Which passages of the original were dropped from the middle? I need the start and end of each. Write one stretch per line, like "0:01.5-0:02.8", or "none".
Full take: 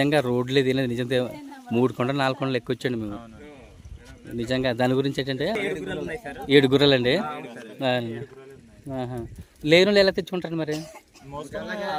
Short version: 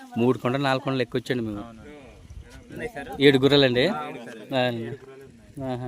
0:04.3-0:06.1